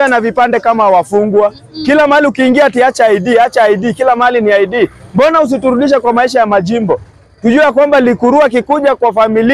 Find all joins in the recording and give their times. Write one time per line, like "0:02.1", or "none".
none

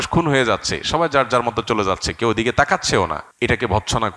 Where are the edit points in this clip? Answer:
0:03.2

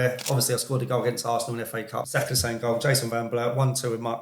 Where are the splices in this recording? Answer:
0:02.1

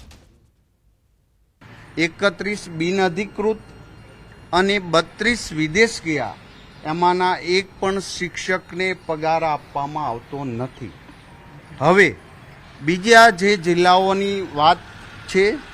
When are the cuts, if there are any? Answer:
0:14.2

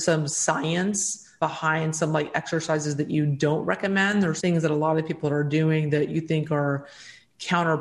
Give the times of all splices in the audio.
0:01.4
0:04.4

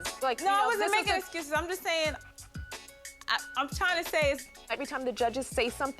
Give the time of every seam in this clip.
0:04.5

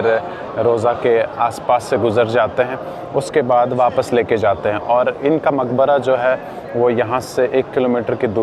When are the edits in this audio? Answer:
none

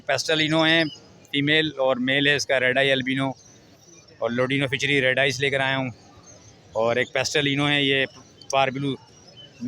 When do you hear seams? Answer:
none

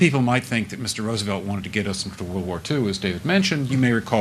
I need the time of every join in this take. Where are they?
0:02.9

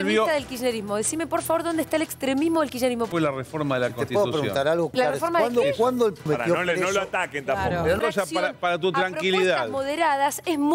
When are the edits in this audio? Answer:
0:03.1
0:04.9
0:06.3
0:08.0

